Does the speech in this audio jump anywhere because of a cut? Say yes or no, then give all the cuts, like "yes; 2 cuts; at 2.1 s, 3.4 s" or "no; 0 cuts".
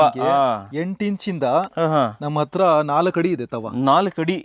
no; 0 cuts